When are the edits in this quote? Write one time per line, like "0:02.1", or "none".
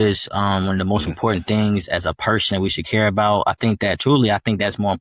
none